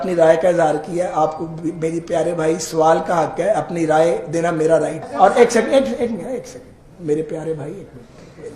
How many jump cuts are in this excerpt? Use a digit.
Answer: 1